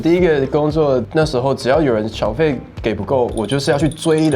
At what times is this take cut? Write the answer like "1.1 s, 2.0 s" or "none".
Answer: 1.1 s

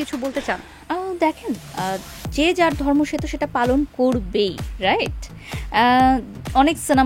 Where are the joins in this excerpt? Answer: none

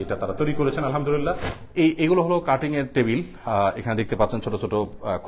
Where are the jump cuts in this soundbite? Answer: 1.5 s

